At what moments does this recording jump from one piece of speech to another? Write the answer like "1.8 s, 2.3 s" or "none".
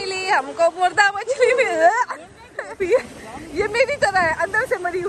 2.8 s